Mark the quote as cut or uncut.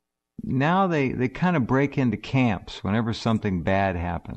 cut